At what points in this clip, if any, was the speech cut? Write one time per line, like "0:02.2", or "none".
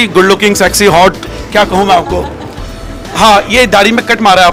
none

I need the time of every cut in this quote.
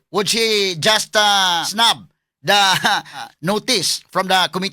0:01.7
0:03.2

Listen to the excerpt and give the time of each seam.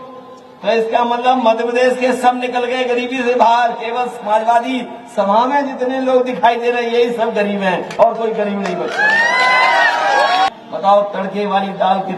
0:10.5

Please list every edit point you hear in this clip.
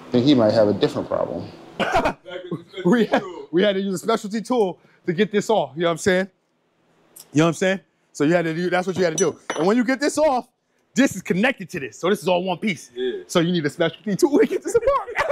0:01.7

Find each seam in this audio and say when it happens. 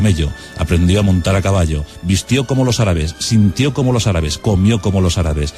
0:02.0

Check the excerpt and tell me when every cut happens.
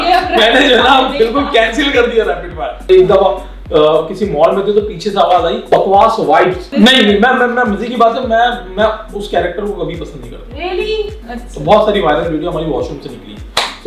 0:02.8
0:06.7
0:11.2

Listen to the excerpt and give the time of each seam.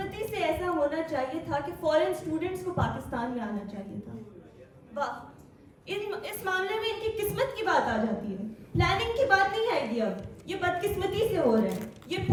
none

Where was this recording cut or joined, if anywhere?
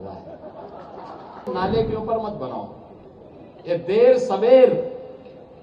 0:01.5

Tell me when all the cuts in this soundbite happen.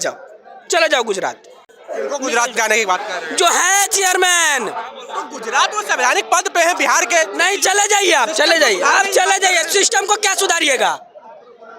none

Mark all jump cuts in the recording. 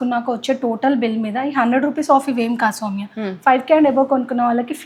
none

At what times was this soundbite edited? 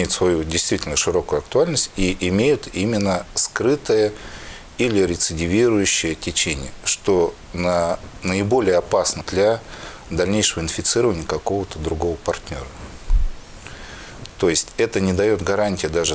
0:09.2

